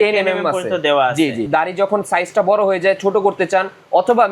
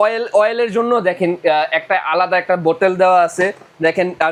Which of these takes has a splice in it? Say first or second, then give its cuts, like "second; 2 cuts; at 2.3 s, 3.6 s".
first; 1 cut; at 1.5 s